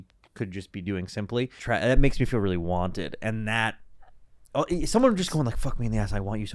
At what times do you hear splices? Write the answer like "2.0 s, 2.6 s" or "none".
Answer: 1.6 s